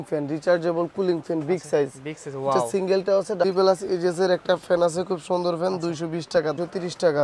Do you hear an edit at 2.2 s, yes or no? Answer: no